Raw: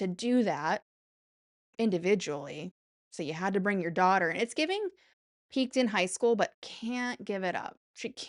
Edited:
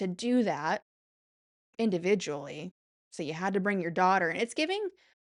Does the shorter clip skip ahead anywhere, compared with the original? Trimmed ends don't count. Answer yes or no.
no